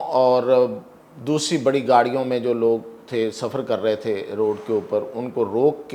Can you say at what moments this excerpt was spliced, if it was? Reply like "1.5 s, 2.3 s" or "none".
none